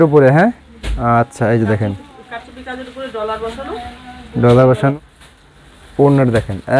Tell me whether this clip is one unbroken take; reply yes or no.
no